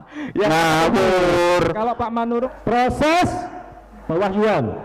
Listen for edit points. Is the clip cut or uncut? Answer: cut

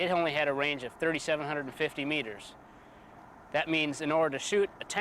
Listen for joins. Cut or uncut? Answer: uncut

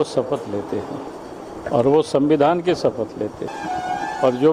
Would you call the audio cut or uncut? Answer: cut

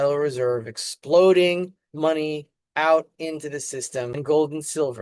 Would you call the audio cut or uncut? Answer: uncut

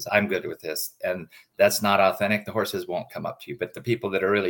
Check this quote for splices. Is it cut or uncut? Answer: uncut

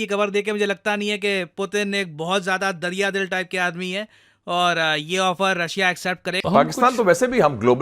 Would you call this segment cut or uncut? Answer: uncut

